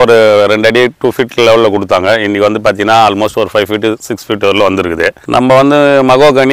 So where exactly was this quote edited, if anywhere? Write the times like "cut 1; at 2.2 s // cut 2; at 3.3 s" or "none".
cut 1; at 5.2 s